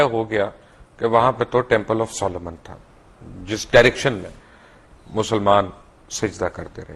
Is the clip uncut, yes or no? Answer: yes